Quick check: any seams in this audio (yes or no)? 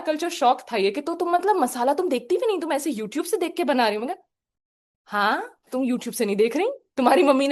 no